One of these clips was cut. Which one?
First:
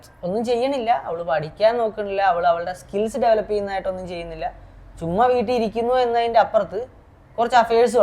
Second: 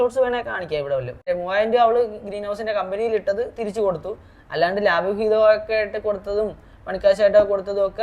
second; 1 cut; at 1.1 s

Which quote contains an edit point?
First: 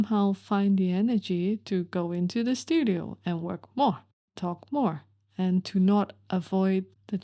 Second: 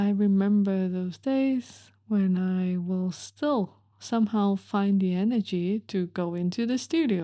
first; 1 cut; at 4.4 s

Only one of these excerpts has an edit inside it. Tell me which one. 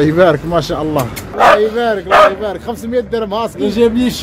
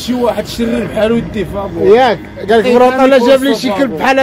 first; 1 cut; at 1.3 s

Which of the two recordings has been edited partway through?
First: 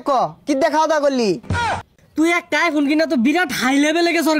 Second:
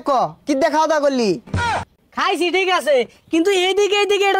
first; 1 cut; at 1.6 s

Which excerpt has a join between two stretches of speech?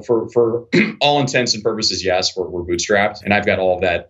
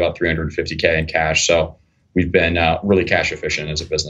first; 1 cut; at 3.2 s

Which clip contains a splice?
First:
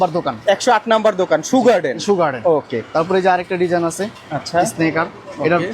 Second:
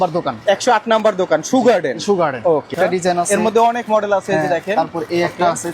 second; 1 cut; at 2.7 s

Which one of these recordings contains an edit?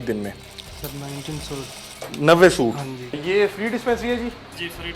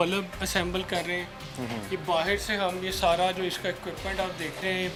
first; 1 cut; at 3.0 s

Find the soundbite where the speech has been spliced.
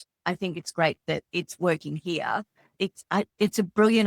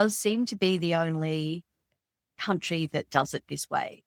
first; 1 cut; at 2.6 s

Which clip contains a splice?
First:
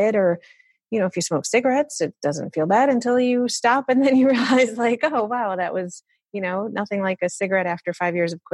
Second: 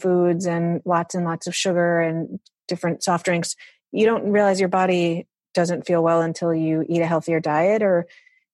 second; 2 cuts; at 0.8 s, 2.5 s

